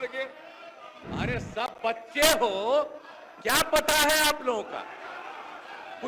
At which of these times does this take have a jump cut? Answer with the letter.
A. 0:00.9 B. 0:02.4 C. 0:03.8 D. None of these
A